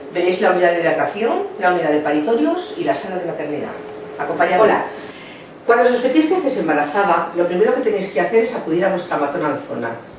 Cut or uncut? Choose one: cut